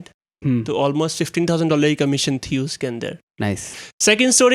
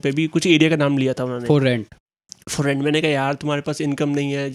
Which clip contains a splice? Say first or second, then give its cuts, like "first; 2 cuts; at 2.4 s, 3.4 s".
first; 1 cut; at 3.6 s